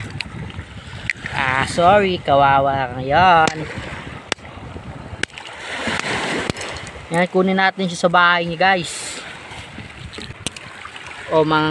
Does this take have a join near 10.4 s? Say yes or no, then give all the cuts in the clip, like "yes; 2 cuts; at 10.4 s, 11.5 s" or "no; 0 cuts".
yes; 1 cut; at 10.4 s